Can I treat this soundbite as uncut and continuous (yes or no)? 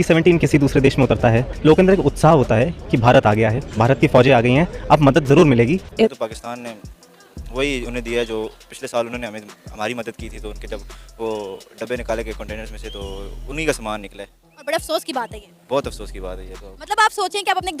no